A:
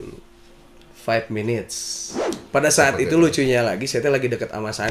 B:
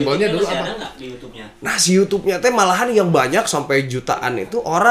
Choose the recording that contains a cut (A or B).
A